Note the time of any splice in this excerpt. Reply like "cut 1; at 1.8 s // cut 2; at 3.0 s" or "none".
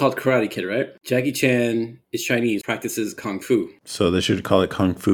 cut 1; at 1.0 s // cut 2; at 2.6 s // cut 3; at 3.8 s